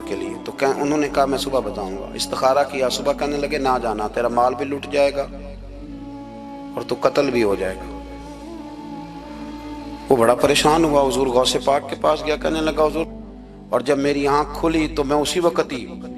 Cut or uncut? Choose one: cut